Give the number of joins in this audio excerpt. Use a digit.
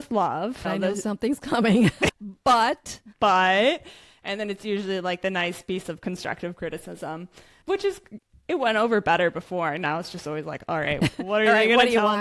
2